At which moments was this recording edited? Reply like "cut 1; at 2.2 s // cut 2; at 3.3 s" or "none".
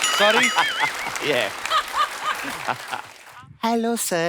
cut 1; at 3.2 s

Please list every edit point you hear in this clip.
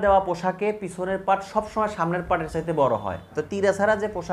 cut 1; at 3.4 s

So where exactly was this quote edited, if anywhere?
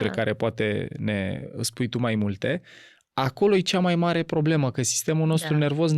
none

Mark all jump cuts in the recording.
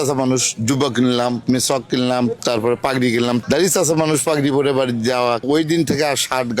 cut 1; at 3.4 s // cut 2; at 5.4 s

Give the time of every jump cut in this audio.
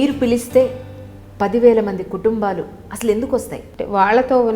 cut 1; at 3.6 s

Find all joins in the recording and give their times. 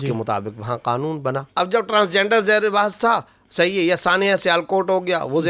cut 1; at 1.4 s

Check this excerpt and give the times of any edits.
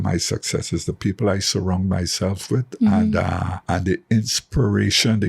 cut 1; at 3.5 s

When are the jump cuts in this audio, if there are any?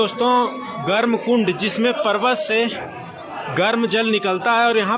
none

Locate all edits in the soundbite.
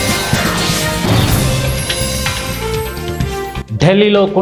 none

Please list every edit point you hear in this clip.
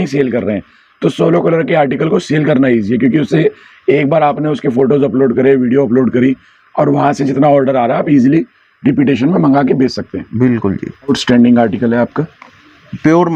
none

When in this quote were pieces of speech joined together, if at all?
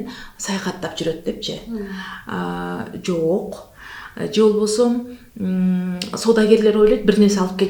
none

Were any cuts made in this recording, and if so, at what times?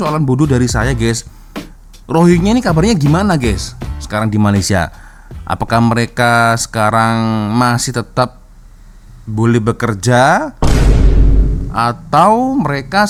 none

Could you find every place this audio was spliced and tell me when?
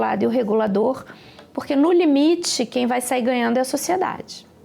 none

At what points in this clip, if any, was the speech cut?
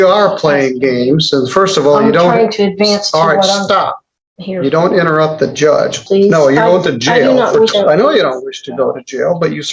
cut 1; at 6.0 s // cut 2; at 7.7 s

